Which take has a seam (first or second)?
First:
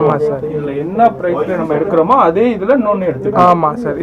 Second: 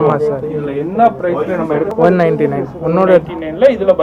second